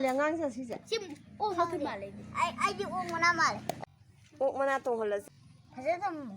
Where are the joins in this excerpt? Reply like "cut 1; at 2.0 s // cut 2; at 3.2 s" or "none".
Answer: cut 1; at 3.8 s // cut 2; at 5.3 s